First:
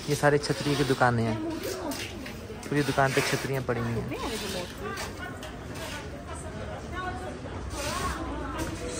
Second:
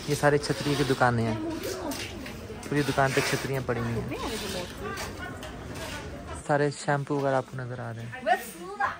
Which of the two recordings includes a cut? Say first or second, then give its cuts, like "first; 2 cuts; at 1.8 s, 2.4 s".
second; 1 cut; at 6.4 s